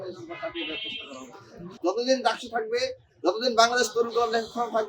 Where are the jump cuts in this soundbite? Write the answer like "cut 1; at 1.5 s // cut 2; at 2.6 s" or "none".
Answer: cut 1; at 1.7 s